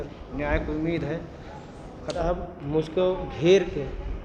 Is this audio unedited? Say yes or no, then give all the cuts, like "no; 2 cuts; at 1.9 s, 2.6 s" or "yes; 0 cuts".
no; 1 cut; at 2.1 s